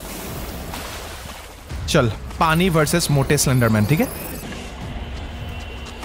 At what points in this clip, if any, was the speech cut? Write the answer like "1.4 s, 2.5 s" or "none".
4.3 s